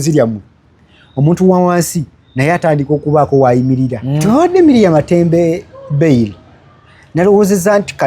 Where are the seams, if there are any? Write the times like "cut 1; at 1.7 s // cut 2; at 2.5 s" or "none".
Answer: cut 1; at 4.2 s